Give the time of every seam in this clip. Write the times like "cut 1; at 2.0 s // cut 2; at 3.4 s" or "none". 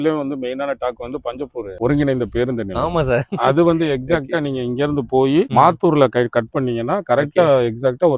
none